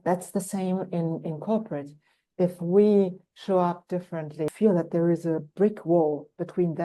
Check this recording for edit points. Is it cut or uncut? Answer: cut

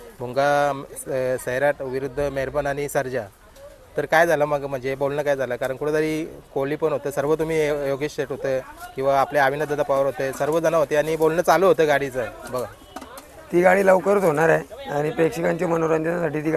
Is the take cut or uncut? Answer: uncut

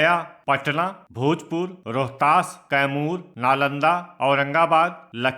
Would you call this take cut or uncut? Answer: cut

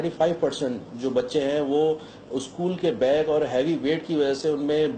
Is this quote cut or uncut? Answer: cut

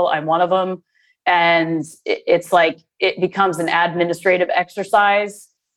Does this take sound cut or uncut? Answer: uncut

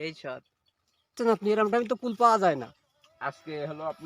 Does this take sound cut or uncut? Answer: cut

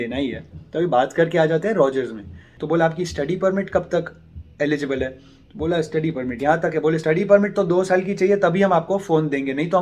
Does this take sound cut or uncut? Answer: cut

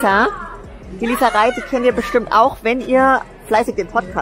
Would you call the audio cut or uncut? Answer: uncut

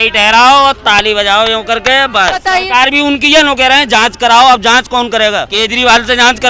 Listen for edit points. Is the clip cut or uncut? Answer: cut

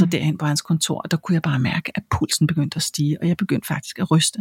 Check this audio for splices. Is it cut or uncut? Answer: uncut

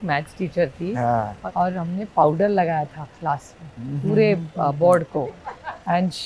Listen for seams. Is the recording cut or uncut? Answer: cut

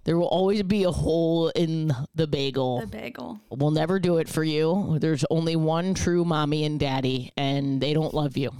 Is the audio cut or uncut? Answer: cut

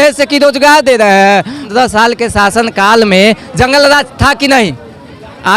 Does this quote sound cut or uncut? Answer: cut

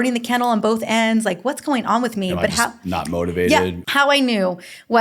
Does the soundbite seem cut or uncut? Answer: cut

